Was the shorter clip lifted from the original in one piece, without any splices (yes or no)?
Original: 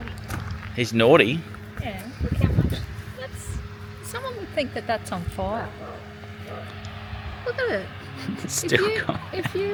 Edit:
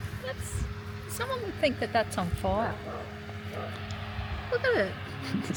yes